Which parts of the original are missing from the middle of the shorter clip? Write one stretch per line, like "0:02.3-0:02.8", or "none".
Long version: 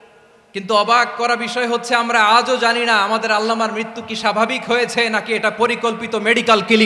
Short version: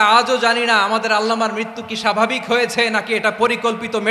none